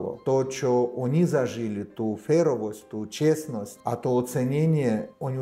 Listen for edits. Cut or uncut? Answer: uncut